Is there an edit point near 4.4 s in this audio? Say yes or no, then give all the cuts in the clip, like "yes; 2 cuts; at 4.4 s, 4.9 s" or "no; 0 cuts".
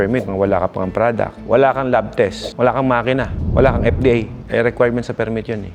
no; 0 cuts